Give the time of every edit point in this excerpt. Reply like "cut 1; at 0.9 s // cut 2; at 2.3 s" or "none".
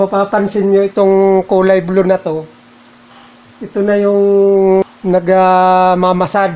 none